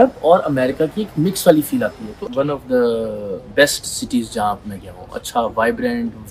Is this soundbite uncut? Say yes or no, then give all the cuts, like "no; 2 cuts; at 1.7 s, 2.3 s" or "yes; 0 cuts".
no; 1 cut; at 2.2 s